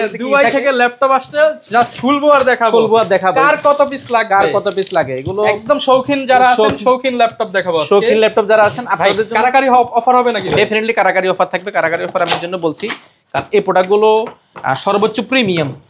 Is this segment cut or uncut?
uncut